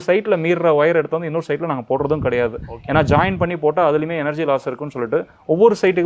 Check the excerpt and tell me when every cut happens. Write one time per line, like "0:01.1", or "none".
none